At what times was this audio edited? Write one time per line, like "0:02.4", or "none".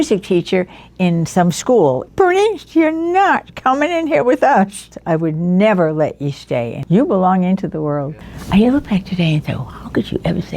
0:02.0
0:04.9
0:08.2

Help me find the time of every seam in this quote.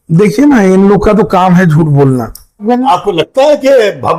0:02.6

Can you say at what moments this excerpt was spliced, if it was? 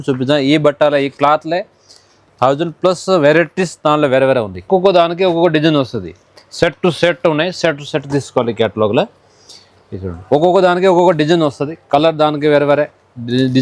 0:04.6

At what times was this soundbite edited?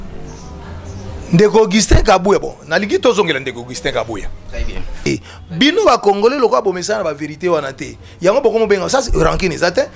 0:04.9

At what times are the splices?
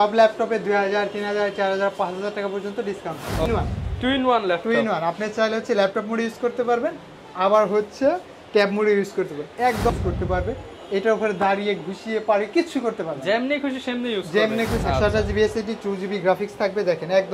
0:03.5
0:09.9
0:14.8

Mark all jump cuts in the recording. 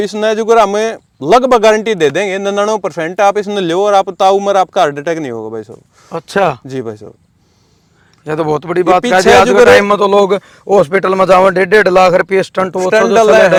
none

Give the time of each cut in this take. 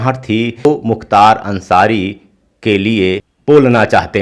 0:00.7
0:03.3

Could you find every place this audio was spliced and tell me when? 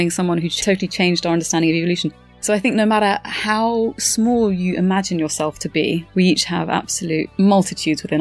0:06.1
0:07.3

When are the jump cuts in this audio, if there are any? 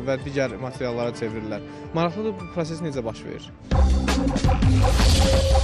0:03.6

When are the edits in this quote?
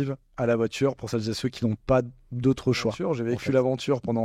0:03.0

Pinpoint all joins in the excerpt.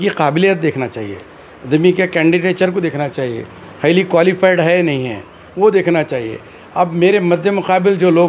none

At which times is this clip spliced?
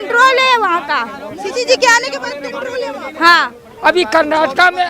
0:03.6

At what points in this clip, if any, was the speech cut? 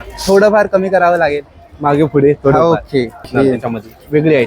0:03.3

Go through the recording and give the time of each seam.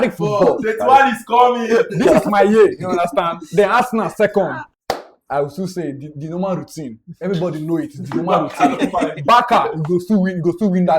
0:04.7

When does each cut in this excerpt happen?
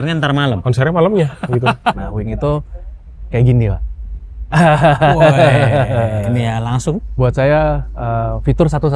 0:01.9
0:07.1

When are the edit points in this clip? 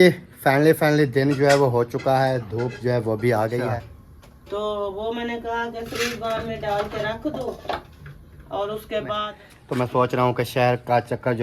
0:03.7
0:09.3

